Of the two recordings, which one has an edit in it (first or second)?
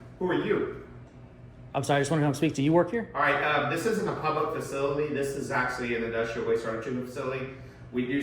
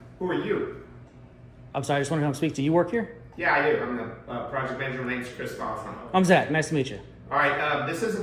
first